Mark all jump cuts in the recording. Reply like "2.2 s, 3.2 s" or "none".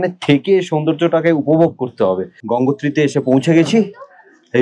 2.4 s